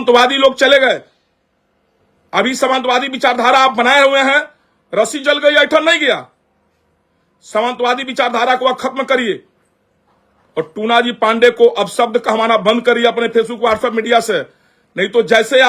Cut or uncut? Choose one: uncut